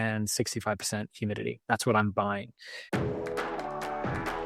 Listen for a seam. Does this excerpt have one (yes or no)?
yes